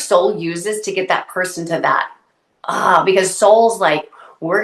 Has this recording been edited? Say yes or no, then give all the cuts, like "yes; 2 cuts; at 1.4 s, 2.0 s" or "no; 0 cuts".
no; 0 cuts